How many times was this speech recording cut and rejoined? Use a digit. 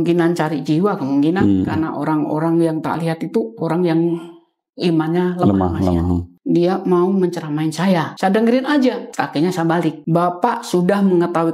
4